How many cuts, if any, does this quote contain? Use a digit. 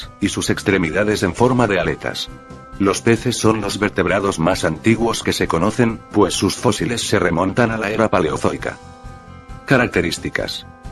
1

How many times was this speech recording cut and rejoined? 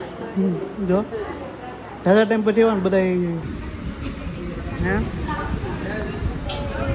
1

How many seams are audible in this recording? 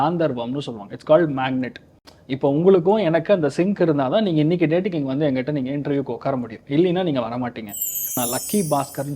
1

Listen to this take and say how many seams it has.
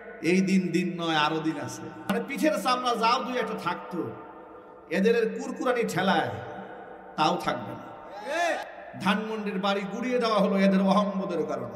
2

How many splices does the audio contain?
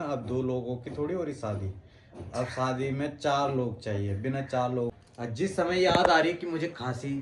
1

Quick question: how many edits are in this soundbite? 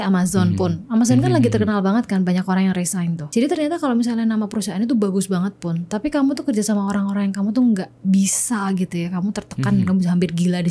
1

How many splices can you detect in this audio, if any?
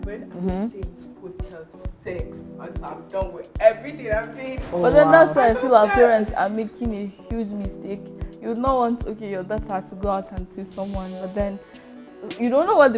0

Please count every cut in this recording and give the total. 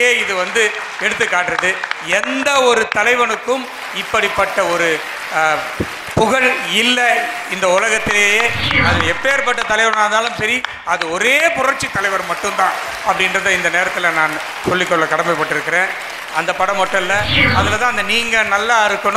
1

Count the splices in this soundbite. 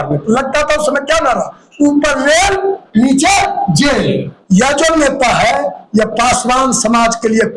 1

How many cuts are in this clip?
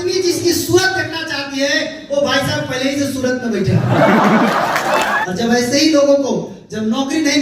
1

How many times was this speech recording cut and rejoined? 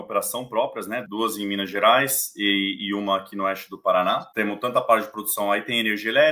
2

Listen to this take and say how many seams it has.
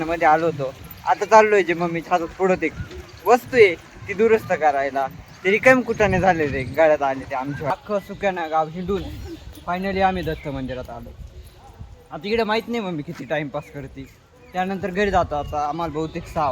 1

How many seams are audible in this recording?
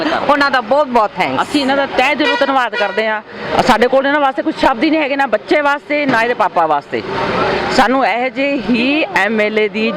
0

